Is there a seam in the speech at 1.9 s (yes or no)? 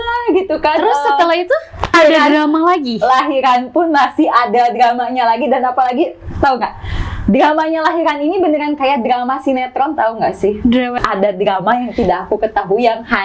yes